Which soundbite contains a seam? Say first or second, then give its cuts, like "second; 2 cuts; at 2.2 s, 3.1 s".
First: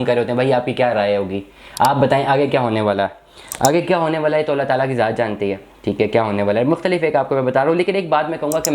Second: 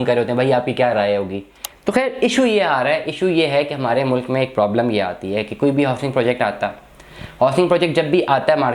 second; 1 cut; at 1.7 s